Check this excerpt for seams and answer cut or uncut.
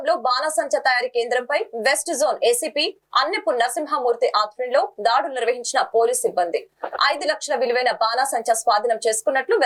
uncut